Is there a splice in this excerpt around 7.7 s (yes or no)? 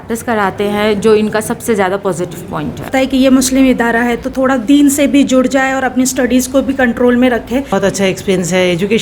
yes